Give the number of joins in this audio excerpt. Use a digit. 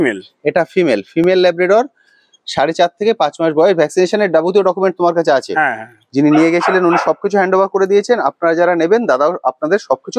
0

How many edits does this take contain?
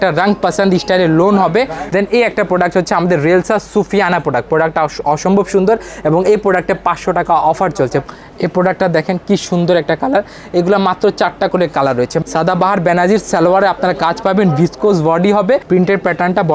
4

